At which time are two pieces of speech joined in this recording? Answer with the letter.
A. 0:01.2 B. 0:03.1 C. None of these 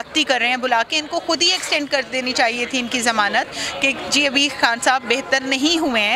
C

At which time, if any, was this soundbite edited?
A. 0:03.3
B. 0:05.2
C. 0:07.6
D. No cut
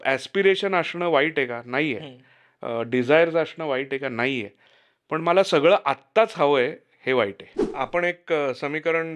C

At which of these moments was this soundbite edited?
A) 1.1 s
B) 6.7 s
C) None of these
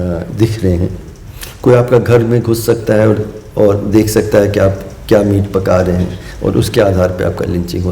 A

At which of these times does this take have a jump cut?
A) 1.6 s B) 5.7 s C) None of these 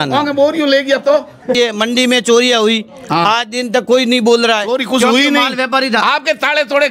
A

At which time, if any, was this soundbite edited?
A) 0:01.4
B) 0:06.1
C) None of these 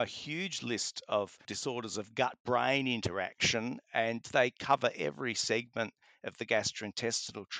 A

